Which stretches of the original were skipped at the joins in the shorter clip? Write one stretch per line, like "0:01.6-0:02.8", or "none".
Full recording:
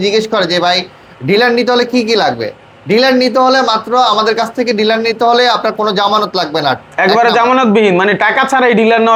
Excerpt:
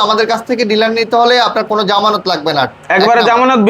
none